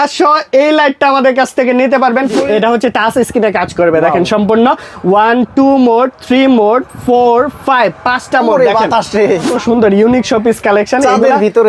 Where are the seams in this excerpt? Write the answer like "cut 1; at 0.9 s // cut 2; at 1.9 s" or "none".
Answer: cut 1; at 2.4 s // cut 2; at 9.5 s